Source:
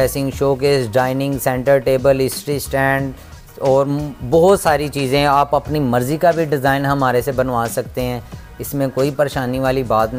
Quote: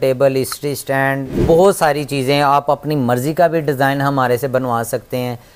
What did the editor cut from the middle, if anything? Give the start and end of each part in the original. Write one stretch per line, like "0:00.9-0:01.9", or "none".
0:03.2-0:04.2